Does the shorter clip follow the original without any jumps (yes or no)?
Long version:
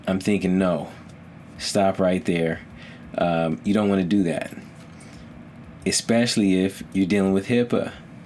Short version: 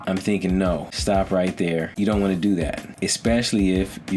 no